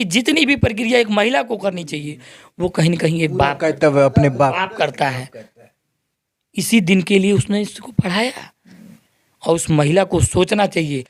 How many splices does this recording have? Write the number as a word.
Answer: zero